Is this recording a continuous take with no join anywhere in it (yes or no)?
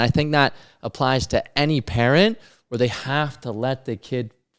yes